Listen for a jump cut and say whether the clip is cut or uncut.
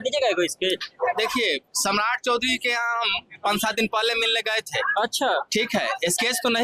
uncut